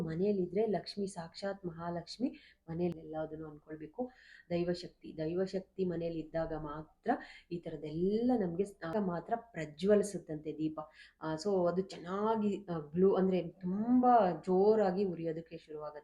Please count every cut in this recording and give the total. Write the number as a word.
two